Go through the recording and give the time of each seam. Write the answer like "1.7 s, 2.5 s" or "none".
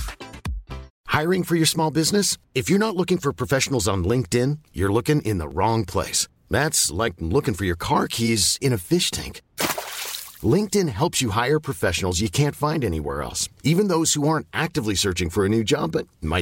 0.9 s